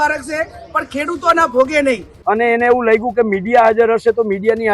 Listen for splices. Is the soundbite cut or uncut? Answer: cut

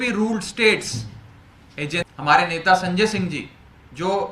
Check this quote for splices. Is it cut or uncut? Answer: cut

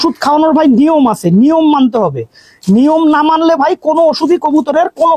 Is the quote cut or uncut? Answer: uncut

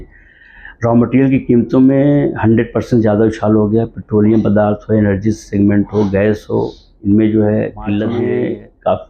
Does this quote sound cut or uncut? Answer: cut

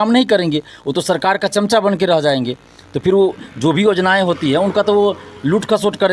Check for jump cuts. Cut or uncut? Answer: uncut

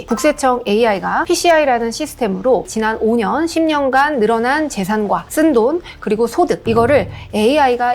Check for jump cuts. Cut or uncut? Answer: uncut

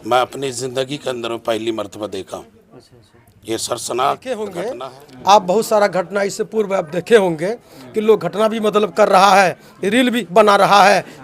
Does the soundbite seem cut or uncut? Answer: cut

